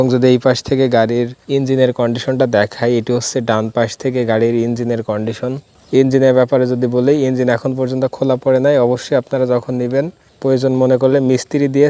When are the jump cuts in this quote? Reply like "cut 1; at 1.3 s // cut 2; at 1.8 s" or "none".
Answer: cut 1; at 1.4 s // cut 2; at 5.7 s